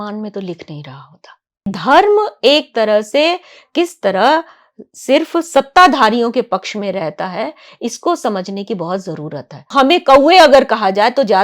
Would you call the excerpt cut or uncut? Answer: cut